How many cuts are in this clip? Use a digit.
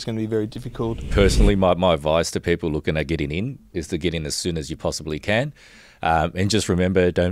1